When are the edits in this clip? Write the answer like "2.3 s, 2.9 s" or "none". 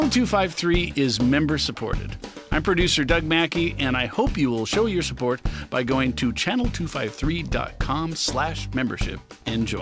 none